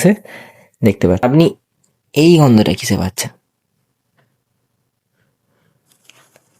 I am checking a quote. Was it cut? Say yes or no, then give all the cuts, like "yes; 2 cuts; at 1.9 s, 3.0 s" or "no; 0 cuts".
yes; 1 cut; at 1.2 s